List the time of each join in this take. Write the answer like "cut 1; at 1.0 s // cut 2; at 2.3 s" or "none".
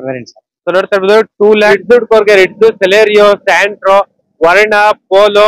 cut 1; at 1.7 s